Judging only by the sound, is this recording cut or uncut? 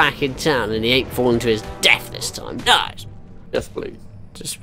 cut